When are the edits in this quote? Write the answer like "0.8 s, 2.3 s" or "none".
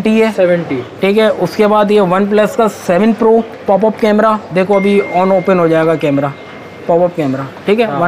none